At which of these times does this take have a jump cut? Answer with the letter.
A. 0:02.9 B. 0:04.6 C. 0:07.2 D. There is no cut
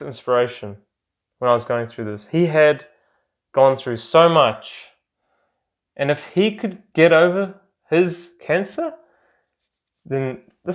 D